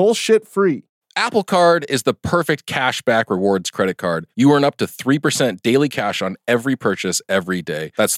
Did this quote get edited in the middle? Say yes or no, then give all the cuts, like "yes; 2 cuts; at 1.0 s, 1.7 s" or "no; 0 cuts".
yes; 1 cut; at 0.9 s